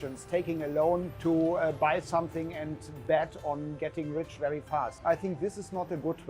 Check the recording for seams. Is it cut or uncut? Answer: cut